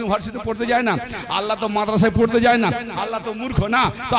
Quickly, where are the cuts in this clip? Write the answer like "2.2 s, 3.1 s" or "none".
none